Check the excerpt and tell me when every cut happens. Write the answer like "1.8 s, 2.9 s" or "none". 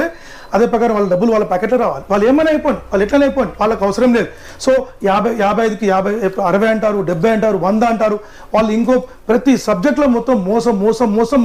none